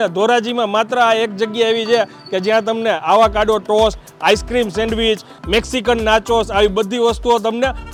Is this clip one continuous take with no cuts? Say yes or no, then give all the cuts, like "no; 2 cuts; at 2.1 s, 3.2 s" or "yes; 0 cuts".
yes; 0 cuts